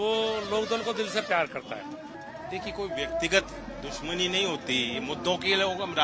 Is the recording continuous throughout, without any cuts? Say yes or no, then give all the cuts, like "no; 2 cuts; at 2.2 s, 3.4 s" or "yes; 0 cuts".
no; 1 cut; at 2.2 s